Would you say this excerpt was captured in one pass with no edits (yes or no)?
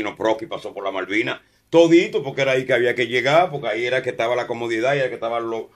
yes